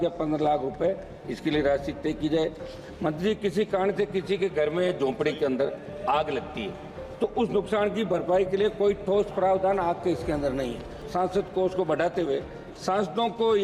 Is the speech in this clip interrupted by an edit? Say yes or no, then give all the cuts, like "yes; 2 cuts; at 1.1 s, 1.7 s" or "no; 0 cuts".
yes; 1 cut; at 11.0 s